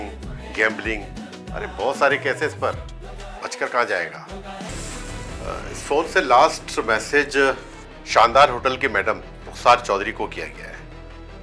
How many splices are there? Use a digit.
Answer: 1